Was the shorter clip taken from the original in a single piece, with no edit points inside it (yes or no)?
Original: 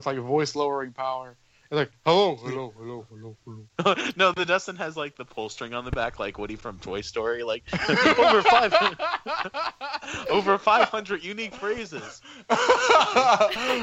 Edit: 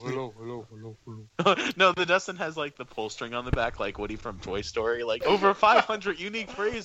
no